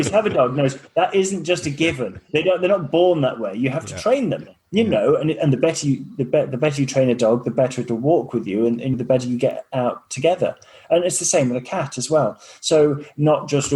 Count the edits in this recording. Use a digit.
1